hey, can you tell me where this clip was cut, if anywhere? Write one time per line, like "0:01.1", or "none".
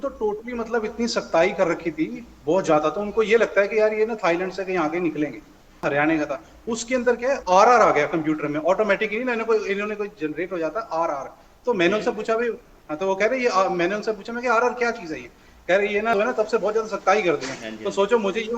0:05.8
0:16.1

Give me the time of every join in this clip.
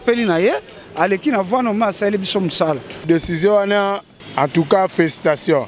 none

